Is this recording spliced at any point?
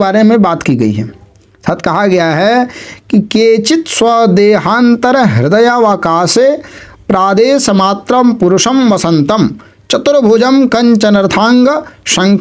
no; 0 cuts

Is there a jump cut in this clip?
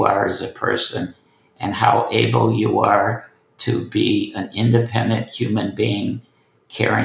no; 0 cuts

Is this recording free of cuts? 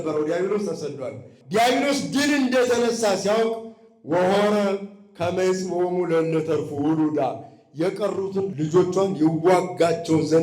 no; 2 cuts; at 1.3 s, 8.5 s

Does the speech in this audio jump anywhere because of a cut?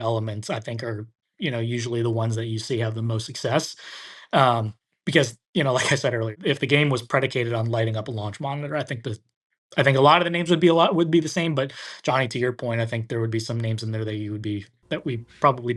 yes; 1 cut; at 6.4 s

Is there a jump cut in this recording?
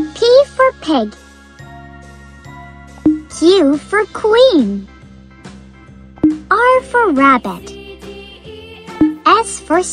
no; 0 cuts

